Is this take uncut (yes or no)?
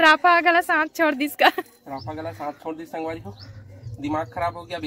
yes